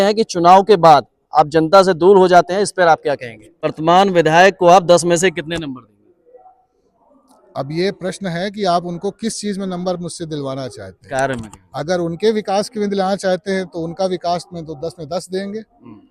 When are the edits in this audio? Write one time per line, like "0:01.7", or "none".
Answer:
0:03.7